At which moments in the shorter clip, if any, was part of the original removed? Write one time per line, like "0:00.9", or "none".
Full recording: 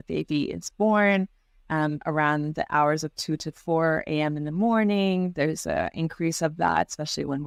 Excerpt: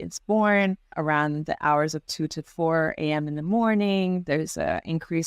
0:00.9